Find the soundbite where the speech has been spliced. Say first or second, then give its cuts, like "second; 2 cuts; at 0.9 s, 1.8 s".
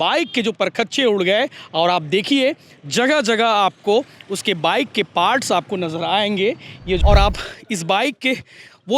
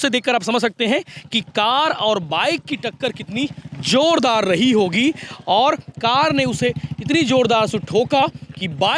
first; 1 cut; at 7.0 s